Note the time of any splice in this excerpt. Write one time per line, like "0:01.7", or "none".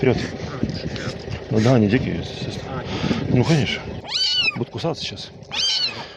0:04.0